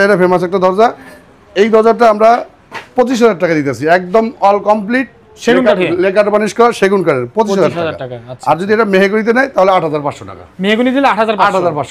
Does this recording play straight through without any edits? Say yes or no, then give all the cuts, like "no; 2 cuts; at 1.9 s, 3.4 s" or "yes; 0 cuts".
yes; 0 cuts